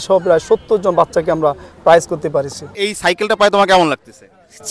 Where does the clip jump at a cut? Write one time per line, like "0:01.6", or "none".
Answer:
0:02.7